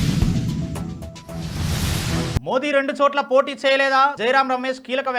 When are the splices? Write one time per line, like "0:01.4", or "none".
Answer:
0:02.4